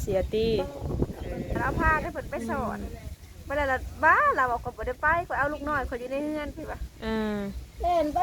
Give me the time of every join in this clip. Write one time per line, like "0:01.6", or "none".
0:01.7